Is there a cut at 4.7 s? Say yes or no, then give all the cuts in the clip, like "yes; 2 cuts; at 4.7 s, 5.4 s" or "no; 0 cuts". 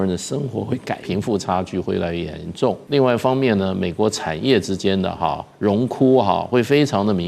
no; 2 cuts; at 1.1 s, 2.8 s